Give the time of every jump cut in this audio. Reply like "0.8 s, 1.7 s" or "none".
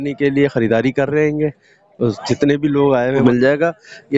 3.2 s

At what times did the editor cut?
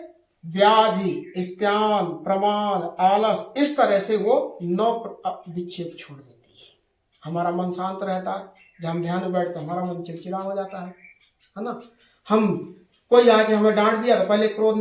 none

